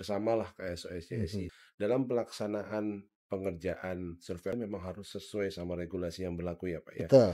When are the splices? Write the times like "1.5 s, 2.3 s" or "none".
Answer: 1.5 s, 4.5 s